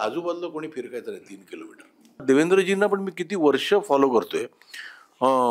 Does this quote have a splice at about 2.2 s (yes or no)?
yes